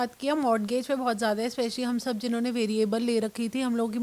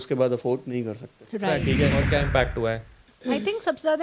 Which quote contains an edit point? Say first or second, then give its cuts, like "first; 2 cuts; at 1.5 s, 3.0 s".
second; 1 cut; at 1.9 s